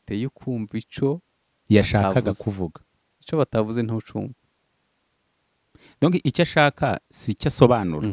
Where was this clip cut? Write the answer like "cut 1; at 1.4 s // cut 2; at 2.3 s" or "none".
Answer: none